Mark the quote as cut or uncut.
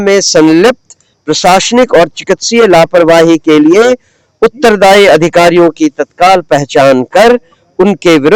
uncut